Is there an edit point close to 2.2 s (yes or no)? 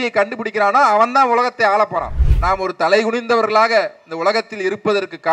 yes